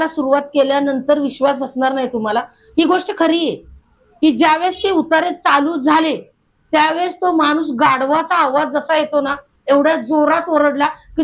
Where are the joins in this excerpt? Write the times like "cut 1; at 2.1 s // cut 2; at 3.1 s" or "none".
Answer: none